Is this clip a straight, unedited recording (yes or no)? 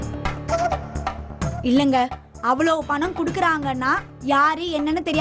yes